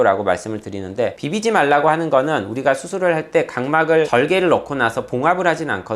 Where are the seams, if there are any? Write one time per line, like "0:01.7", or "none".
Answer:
0:01.2